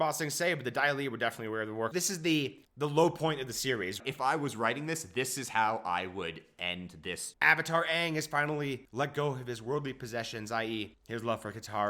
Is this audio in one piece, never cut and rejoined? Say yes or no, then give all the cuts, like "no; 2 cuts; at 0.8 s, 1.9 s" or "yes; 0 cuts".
no; 3 cuts; at 1.9 s, 4.0 s, 7.3 s